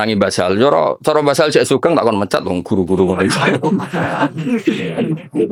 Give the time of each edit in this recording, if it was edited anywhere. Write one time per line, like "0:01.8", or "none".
none